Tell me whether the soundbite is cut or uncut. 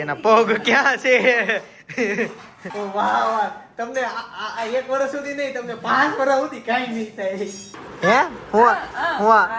cut